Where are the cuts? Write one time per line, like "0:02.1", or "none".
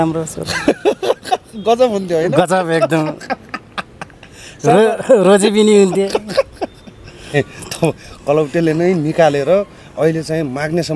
0:07.3